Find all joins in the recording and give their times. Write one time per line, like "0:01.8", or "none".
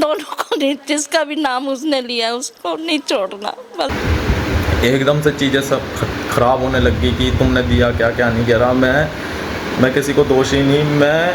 0:03.9

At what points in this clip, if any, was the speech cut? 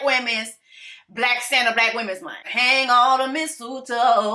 0:02.5

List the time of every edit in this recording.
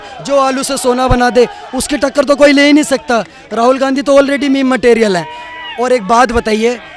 none

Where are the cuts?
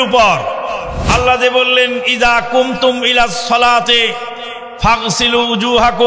0:01.0

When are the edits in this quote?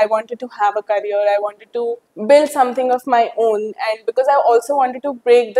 0:02.1

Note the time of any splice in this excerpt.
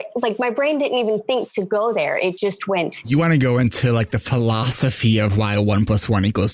none

